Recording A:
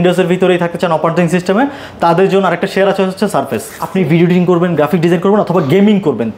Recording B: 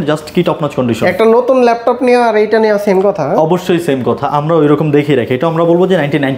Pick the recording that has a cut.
A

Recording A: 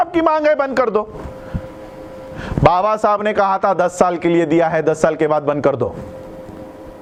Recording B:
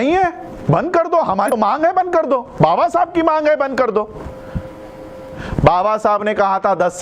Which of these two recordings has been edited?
B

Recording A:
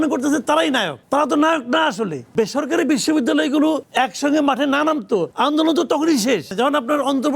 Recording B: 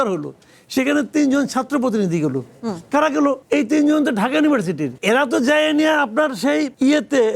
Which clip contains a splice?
A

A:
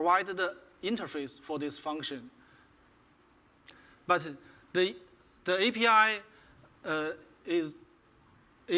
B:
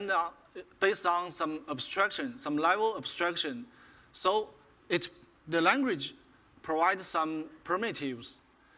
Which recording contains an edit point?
A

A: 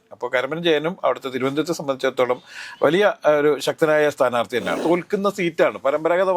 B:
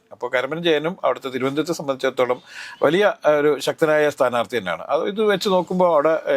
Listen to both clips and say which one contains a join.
A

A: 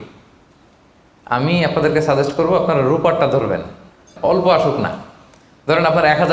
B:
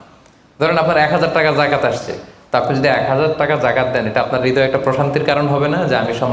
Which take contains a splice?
A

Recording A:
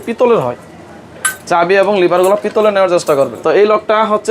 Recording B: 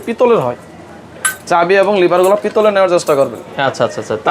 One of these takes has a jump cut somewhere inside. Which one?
A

